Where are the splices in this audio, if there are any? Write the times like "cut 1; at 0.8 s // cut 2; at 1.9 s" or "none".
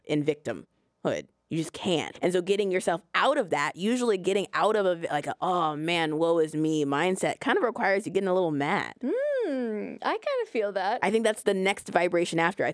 cut 1; at 2.1 s // cut 2; at 8.9 s